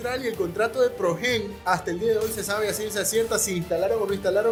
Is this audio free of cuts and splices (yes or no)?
yes